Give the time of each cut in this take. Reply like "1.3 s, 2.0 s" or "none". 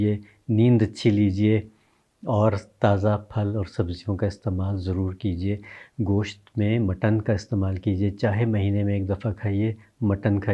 none